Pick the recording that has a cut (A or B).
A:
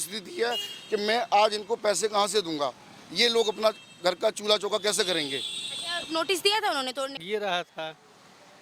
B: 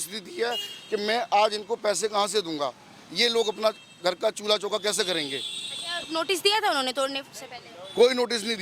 A